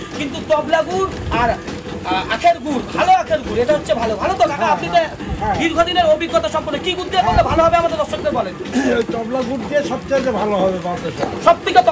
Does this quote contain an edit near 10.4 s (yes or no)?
no